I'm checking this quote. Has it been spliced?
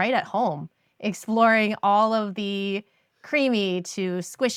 no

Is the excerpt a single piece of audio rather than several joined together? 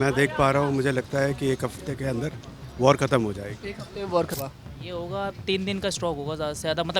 no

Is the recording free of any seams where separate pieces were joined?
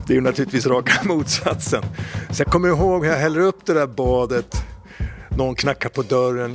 yes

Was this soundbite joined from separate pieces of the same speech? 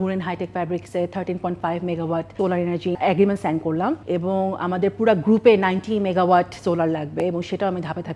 no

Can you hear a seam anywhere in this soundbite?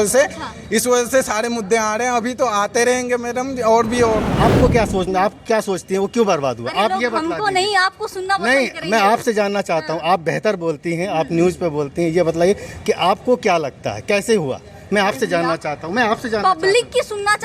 yes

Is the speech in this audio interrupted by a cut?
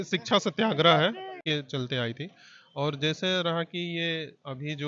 yes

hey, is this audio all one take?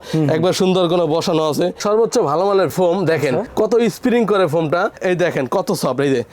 no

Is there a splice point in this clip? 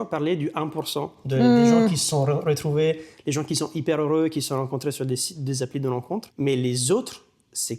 yes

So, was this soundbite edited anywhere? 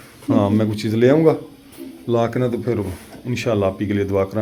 no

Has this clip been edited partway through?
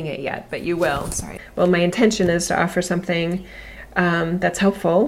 yes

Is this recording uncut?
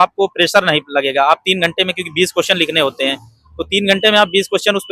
yes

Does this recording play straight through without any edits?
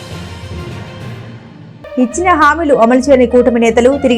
no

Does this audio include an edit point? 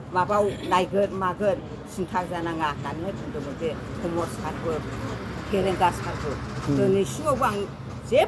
no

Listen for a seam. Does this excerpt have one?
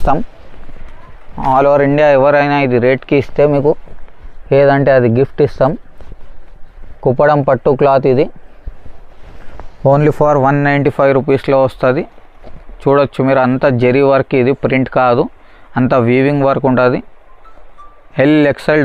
no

